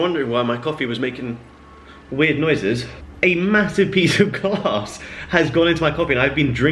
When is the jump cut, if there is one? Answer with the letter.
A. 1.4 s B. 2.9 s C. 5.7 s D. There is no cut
B